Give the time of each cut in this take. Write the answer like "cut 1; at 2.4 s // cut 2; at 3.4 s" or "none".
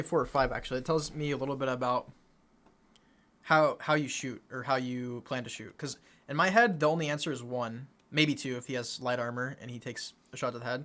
none